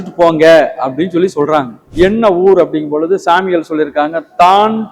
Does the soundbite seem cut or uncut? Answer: cut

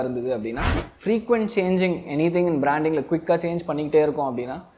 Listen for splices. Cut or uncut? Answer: cut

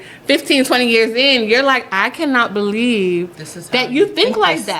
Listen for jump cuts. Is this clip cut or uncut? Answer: uncut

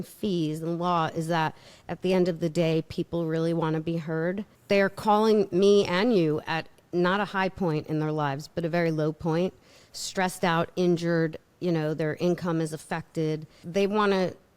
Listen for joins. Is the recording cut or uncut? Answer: cut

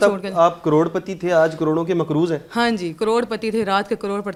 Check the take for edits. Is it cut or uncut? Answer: uncut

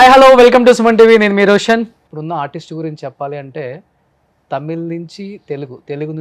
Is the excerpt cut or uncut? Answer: cut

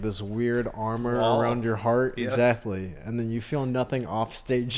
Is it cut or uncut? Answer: uncut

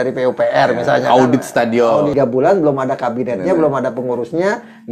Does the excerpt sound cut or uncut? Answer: cut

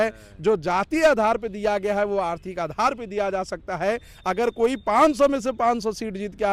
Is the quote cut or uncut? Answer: uncut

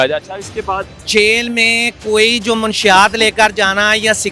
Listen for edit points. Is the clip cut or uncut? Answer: cut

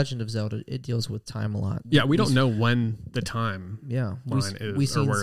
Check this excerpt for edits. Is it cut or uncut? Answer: cut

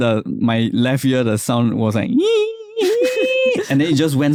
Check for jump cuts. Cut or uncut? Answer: uncut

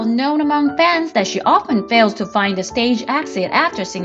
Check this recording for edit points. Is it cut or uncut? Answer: uncut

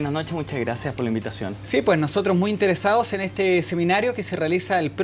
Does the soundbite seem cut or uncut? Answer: cut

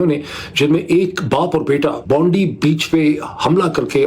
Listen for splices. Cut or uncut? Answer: cut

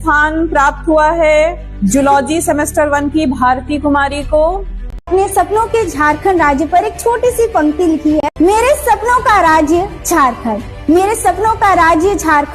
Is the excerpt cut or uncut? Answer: cut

